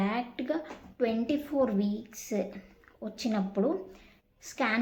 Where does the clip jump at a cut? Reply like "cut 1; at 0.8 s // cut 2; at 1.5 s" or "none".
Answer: none